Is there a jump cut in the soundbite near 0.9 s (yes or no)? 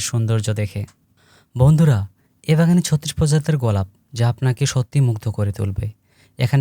yes